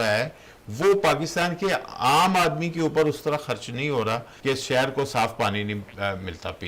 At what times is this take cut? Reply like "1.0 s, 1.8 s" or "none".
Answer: 4.3 s